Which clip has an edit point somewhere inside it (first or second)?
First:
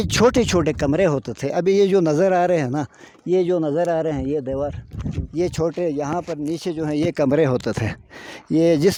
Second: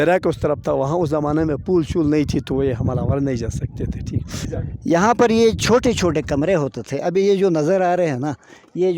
second